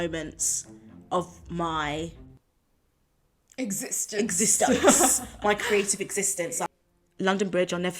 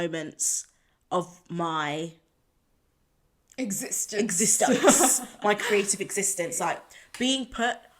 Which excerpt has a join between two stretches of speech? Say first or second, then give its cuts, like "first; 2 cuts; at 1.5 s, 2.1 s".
first; 1 cut; at 6.7 s